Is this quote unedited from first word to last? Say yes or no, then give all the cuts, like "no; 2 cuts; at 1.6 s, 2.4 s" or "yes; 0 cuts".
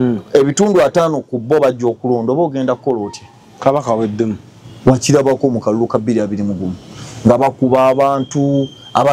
yes; 0 cuts